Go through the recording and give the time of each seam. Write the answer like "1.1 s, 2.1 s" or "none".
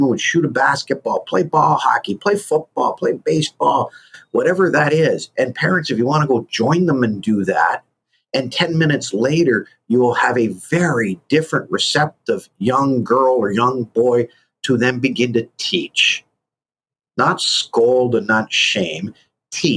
none